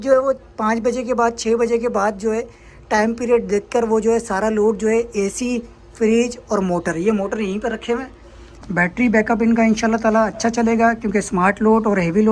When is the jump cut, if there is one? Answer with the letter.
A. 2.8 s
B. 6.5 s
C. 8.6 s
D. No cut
C